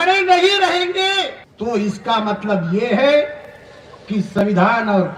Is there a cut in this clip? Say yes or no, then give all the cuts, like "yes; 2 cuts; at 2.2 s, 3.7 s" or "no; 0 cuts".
yes; 1 cut; at 1.4 s